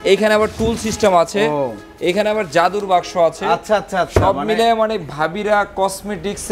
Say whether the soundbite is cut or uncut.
uncut